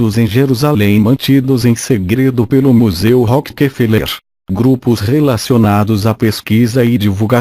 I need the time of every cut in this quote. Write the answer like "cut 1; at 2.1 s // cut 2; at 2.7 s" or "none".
cut 1; at 1.0 s